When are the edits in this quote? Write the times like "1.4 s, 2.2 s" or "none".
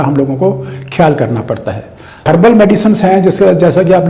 2.2 s